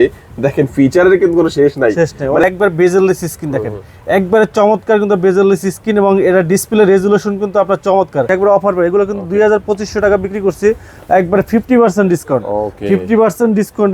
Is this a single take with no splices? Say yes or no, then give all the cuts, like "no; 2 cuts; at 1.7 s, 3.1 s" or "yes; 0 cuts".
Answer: no; 2 cuts; at 2.4 s, 8.3 s